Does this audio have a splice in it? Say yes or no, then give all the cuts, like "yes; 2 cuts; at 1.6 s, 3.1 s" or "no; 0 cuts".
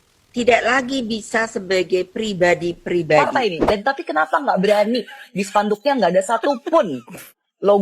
yes; 1 cut; at 3.2 s